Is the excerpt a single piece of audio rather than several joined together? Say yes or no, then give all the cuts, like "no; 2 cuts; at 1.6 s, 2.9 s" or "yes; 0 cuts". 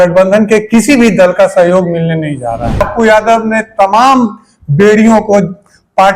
no; 1 cut; at 2.9 s